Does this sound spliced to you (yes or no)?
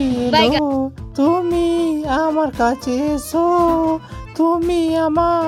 no